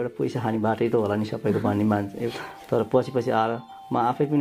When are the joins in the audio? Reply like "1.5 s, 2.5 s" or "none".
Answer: 2.3 s